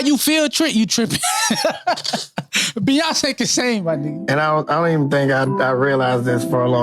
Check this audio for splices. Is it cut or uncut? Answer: cut